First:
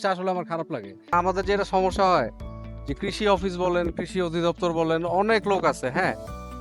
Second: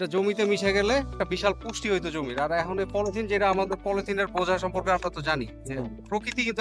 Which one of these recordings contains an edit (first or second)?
first